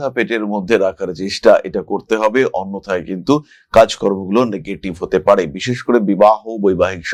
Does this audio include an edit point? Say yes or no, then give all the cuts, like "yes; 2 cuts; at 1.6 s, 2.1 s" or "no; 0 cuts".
no; 0 cuts